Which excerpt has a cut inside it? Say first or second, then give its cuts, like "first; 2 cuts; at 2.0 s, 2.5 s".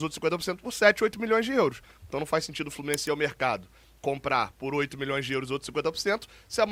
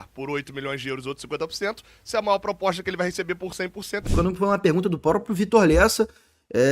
second; 1 cut; at 4.1 s